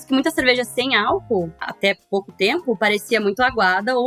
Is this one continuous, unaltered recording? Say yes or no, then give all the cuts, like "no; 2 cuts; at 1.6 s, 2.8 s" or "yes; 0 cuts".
no; 1 cut; at 1.5 s